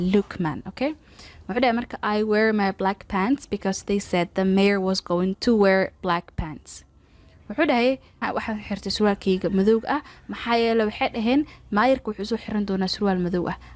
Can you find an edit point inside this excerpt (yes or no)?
no